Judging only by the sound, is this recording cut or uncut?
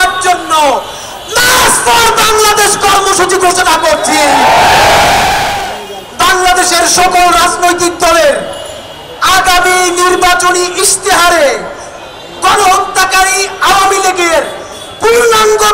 cut